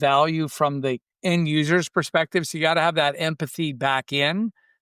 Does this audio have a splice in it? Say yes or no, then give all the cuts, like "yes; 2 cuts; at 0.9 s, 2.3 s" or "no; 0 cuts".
yes; 1 cut; at 1.1 s